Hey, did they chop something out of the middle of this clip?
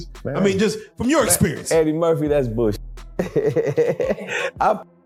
no; 0 cuts

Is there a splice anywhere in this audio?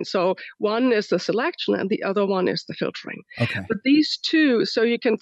no; 0 cuts

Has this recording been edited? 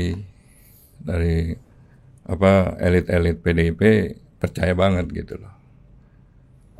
no; 0 cuts

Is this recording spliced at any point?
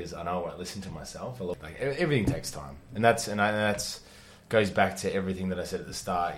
yes; 1 cut; at 1.5 s

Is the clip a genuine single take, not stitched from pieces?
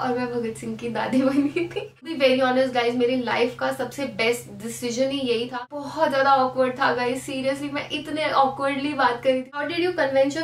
no; 3 cuts; at 2.1 s, 5.5 s, 9.6 s

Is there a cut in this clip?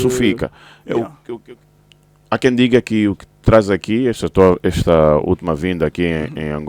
yes; 1 cut; at 1.4 s

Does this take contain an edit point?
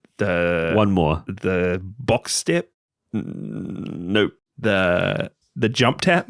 yes; 2 cuts; at 4.5 s, 5.4 s

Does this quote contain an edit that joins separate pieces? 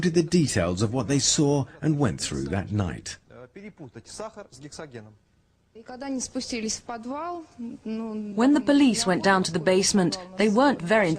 yes; 1 cut; at 8.1 s

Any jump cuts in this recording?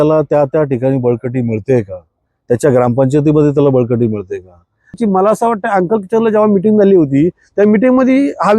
yes; 1 cut; at 4.9 s

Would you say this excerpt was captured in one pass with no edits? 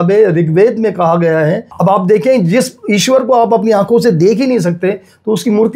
no; 1 cut; at 1.7 s

